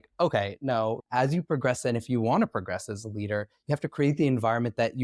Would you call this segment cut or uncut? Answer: uncut